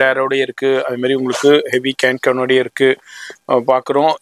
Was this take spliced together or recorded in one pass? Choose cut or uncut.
uncut